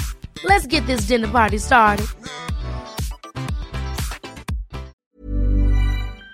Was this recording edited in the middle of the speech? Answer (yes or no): yes